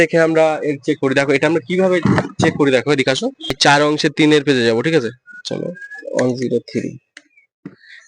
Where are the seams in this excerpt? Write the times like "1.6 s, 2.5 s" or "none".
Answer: 3.5 s